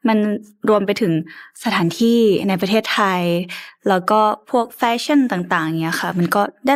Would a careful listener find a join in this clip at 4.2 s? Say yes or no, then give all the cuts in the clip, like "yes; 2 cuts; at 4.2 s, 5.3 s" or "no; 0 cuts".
no; 0 cuts